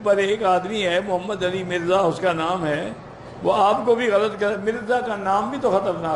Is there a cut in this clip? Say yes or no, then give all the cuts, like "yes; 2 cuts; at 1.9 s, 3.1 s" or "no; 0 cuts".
no; 0 cuts